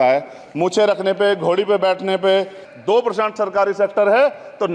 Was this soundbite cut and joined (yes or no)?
yes